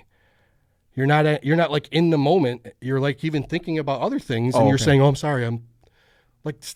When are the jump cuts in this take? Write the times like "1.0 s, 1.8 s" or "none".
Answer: none